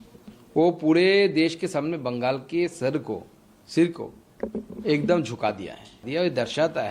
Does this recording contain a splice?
yes; 1 cut; at 6.0 s

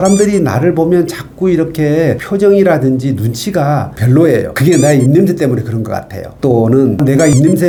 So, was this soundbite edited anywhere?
no; 0 cuts

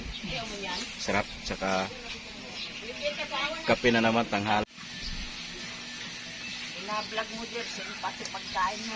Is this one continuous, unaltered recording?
no; 1 cut; at 4.6 s

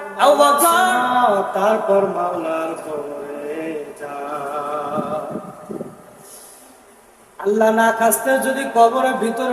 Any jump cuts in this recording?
yes; 1 cut; at 1.0 s

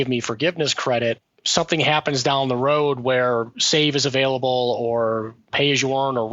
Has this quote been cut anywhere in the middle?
yes; 2 cuts; at 1.3 s, 5.4 s

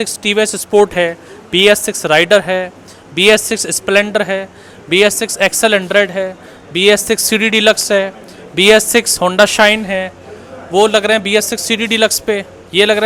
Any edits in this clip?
no; 0 cuts

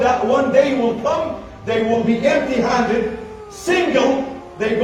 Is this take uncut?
yes; 0 cuts

